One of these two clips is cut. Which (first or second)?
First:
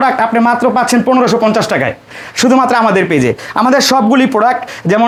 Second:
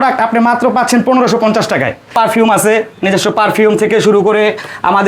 second